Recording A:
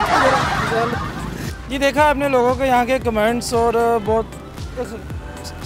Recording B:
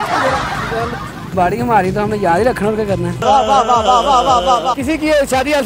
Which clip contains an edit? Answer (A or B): B